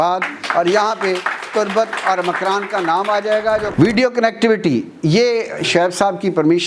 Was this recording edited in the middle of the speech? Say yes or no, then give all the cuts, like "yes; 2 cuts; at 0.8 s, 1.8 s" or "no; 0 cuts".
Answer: yes; 1 cut; at 3.7 s